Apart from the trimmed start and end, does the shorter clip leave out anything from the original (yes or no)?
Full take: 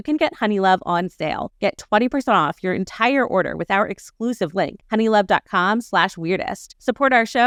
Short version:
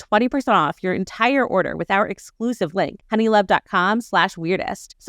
no